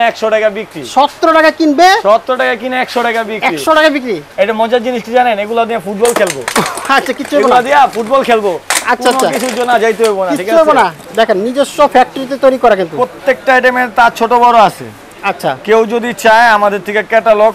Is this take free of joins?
no; 2 cuts; at 4.3 s, 11.0 s

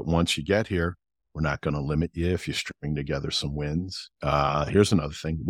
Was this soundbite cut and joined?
no; 0 cuts

